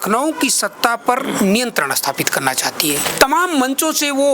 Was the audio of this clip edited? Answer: yes; 1 cut; at 3.0 s

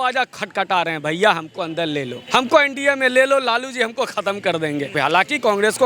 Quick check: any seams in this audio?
yes; 2 cuts; at 2.2 s, 4.9 s

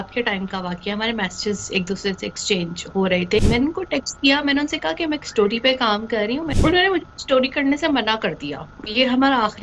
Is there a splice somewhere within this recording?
yes; 2 cuts; at 3.4 s, 6.5 s

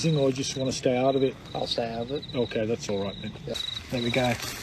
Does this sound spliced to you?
yes; 1 cut; at 3.5 s

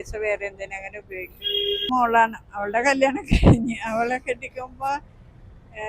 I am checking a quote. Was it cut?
yes; 1 cut; at 1.9 s

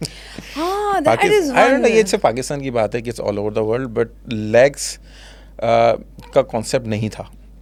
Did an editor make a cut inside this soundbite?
no; 0 cuts

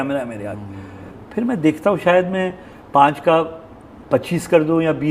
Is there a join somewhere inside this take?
yes; 1 cut; at 1.2 s

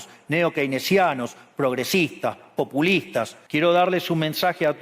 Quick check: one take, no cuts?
no; 1 cut; at 3.4 s

